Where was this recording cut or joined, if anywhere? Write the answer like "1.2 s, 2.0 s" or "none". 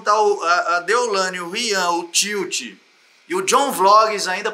none